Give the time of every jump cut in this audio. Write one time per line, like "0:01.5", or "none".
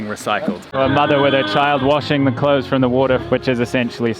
0:00.7
0:03.2